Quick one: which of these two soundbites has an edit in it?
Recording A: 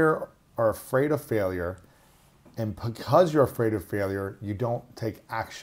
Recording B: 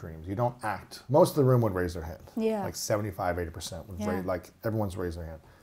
B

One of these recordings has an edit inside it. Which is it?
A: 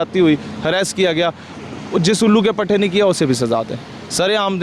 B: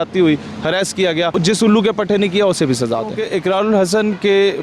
B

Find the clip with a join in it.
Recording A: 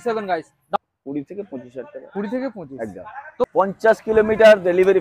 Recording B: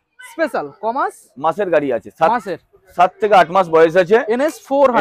A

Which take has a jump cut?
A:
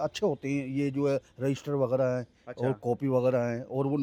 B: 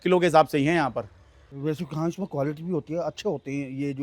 B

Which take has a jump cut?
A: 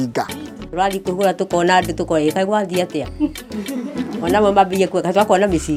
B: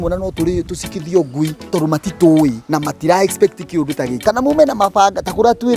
B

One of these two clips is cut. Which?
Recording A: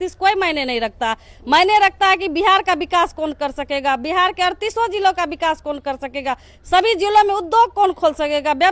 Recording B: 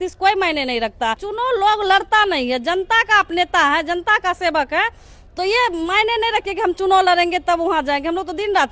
B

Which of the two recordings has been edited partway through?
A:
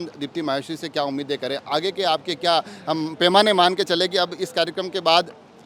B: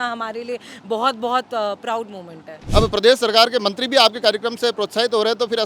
B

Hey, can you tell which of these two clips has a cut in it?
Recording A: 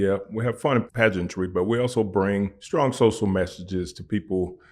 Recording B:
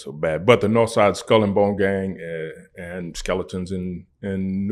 A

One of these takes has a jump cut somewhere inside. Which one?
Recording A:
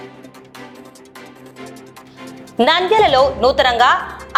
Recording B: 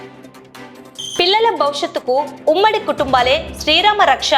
B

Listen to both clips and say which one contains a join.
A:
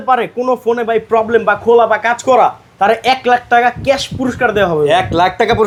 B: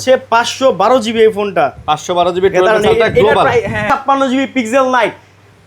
B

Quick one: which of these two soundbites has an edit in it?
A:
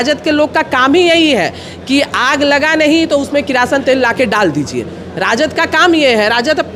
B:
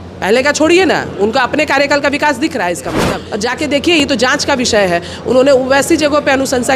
B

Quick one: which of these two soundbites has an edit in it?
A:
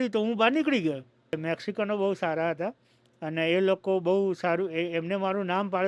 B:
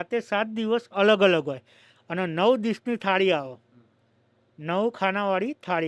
A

